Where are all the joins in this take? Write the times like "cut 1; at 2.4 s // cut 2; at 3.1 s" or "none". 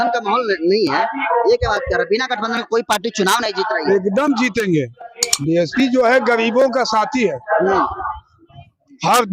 cut 1; at 5.3 s

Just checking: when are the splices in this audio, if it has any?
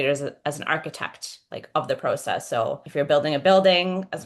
cut 1; at 2.8 s

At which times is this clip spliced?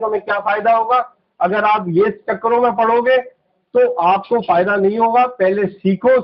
none

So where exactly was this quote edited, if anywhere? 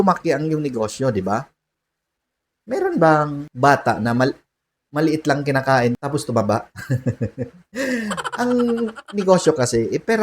cut 1; at 3.4 s // cut 2; at 6.0 s

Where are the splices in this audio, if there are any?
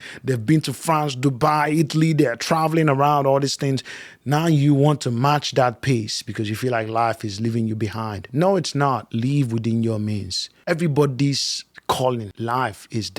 cut 1; at 9.1 s // cut 2; at 12.3 s

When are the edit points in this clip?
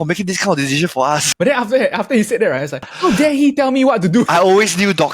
cut 1; at 1.3 s // cut 2; at 2.9 s // cut 3; at 4.3 s

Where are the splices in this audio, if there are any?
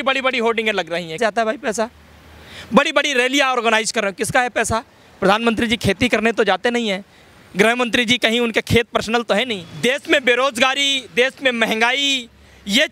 cut 1; at 9.6 s

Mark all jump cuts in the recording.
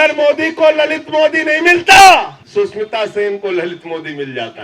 cut 1; at 2.4 s

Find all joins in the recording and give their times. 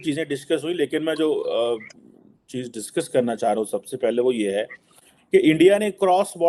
none

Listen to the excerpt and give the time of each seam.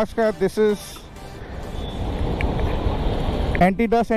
none

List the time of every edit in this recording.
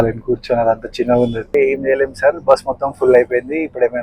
cut 1; at 1.5 s

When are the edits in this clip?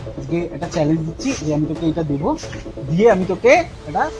none

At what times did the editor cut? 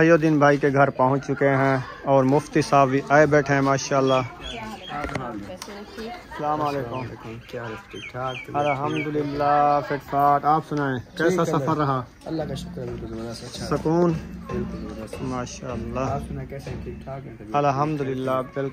none

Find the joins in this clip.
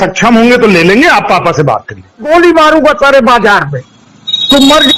cut 1; at 2.3 s

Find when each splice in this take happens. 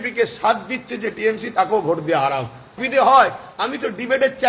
cut 1; at 2.8 s

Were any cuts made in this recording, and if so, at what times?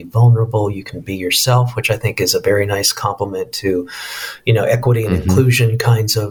none

